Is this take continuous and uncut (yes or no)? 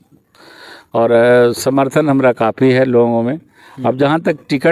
yes